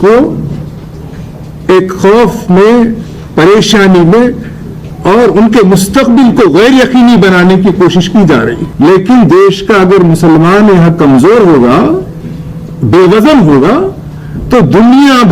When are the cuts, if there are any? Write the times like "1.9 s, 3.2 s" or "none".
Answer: 8.6 s